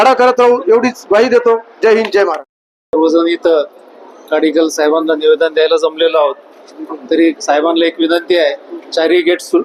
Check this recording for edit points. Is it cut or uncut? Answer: uncut